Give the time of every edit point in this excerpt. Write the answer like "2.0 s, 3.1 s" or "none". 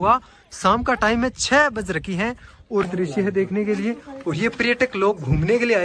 2.8 s